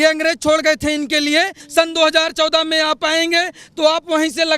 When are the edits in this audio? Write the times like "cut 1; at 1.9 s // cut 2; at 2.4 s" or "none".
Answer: cut 1; at 1.6 s